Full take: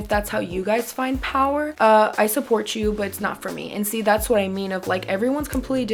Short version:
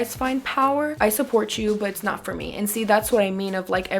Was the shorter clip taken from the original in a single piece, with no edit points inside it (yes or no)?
no